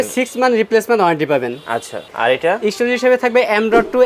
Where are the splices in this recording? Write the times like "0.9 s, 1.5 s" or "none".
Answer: 2.0 s